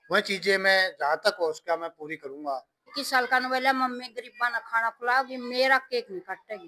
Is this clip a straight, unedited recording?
no; 1 cut; at 2.9 s

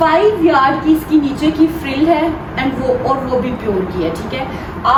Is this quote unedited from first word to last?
yes; 0 cuts

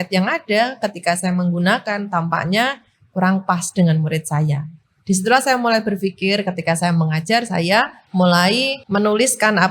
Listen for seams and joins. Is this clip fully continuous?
no; 2 cuts; at 8.0 s, 8.8 s

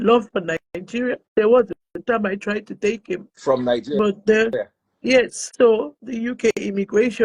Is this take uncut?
no; 3 cuts; at 1.2 s, 1.9 s, 5.4 s

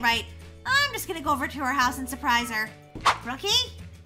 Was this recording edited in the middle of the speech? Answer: yes; 1 cut; at 3.1 s

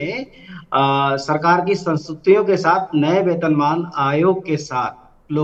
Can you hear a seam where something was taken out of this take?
no; 0 cuts

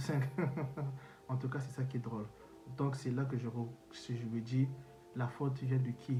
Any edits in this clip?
no; 0 cuts

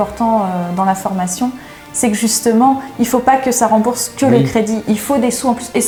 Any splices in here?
no; 0 cuts

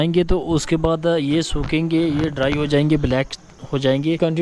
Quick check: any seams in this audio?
no; 0 cuts

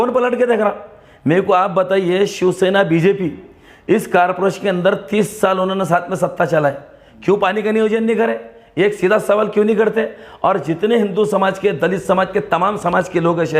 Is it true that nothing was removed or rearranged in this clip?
yes; 0 cuts

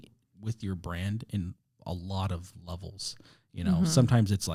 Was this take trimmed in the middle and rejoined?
no; 0 cuts

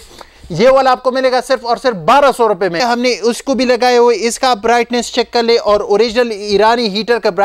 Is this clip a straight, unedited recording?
no; 1 cut; at 2.8 s

